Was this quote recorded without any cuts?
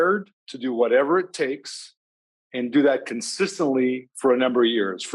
yes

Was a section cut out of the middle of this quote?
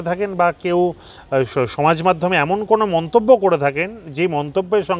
no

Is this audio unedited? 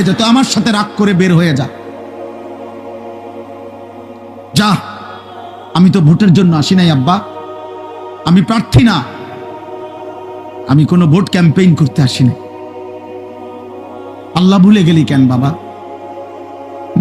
no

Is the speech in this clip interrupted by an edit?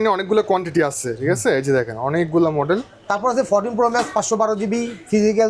no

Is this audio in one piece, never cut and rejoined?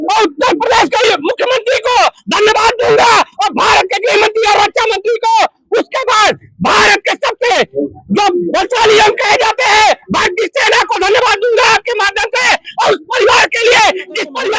yes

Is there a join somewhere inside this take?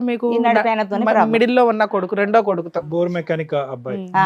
no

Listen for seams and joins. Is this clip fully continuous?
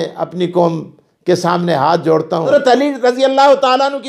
no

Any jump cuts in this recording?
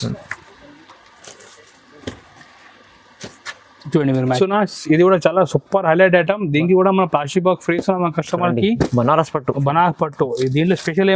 yes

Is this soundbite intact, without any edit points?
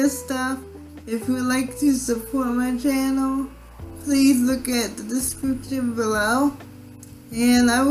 yes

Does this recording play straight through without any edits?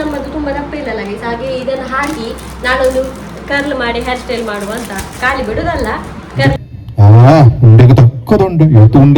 no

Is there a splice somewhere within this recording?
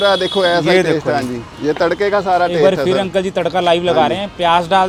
no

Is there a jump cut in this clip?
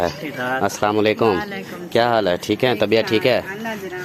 no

